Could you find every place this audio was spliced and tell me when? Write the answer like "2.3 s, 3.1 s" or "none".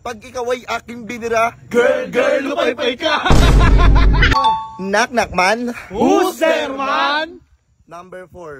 4.3 s